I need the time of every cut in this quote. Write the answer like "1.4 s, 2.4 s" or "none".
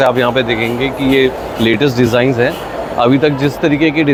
none